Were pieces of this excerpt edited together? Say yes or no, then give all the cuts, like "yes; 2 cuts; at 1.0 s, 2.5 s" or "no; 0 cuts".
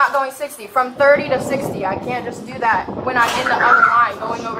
no; 0 cuts